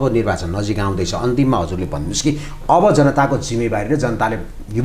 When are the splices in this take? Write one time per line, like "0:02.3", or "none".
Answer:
none